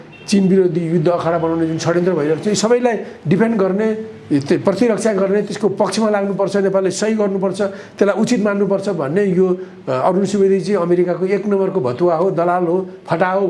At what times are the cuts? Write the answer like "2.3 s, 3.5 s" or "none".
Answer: none